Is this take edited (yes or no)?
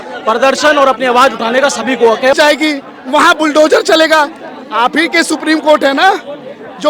yes